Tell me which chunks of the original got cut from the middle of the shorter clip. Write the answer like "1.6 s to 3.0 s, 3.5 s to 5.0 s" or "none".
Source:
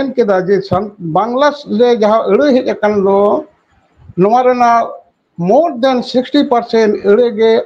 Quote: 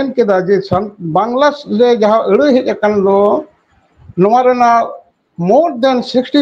none